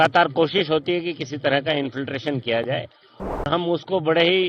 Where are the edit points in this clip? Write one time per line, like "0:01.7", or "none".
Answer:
0:03.4